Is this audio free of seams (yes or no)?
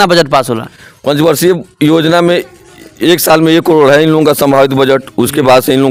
yes